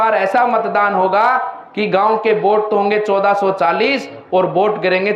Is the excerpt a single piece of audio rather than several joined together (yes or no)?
yes